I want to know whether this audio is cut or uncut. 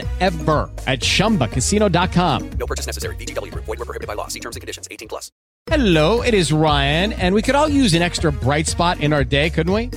cut